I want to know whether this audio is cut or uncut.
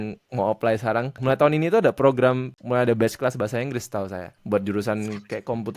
cut